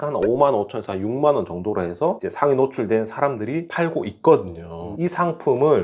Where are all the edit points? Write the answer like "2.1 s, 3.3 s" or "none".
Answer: 4.9 s